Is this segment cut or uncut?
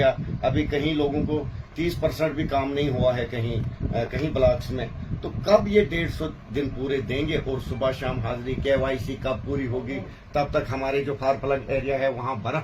uncut